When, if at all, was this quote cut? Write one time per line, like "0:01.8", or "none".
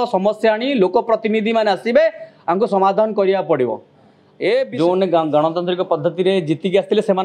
0:04.7